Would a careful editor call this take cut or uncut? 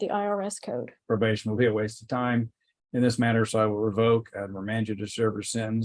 cut